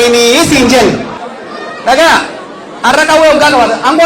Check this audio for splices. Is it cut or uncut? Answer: cut